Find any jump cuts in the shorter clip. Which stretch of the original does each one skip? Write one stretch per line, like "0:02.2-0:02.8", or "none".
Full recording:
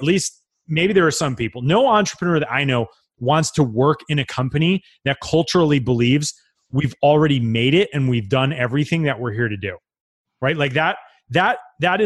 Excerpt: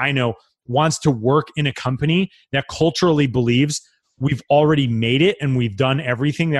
none